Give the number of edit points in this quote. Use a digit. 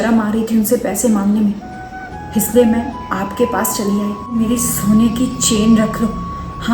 1